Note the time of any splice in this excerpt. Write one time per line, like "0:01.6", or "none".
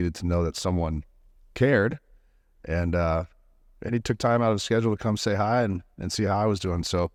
none